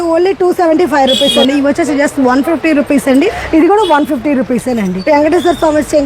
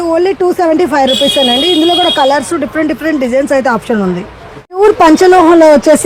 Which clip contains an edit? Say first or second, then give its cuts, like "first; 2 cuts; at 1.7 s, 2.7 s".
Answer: first; 3 cuts; at 1.4 s, 3.4 s, 4.9 s